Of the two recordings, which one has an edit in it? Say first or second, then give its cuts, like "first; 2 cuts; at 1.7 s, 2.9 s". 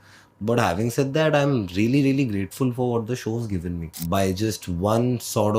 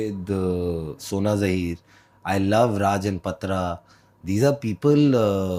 first; 1 cut; at 4.0 s